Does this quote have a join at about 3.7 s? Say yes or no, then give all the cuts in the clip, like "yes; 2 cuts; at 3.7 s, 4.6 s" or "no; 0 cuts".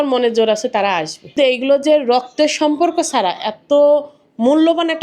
no; 1 cut; at 1.4 s